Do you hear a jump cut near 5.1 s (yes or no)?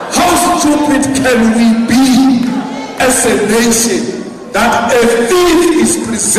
no